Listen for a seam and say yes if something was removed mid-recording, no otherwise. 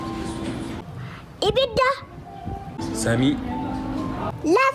no